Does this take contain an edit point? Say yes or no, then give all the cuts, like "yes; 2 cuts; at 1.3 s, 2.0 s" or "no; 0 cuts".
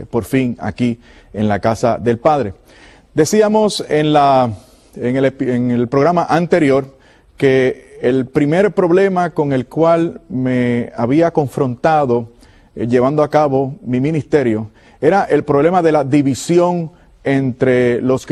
no; 0 cuts